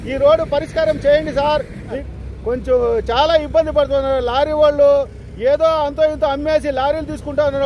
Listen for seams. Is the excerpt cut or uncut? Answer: cut